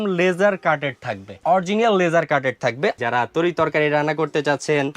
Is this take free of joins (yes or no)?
no